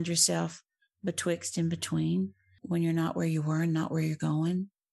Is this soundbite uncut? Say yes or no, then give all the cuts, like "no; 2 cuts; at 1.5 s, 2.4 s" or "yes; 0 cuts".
yes; 0 cuts